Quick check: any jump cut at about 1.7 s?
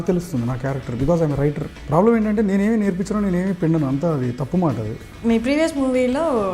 yes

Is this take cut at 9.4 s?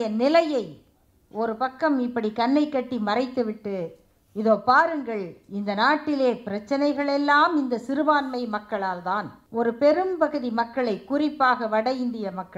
yes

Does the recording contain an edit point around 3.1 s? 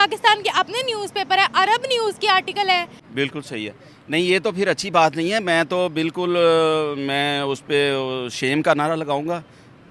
yes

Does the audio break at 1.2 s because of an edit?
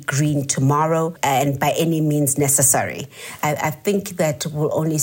yes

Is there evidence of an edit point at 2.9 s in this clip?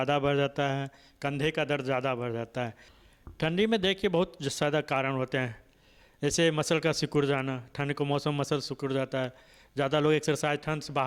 yes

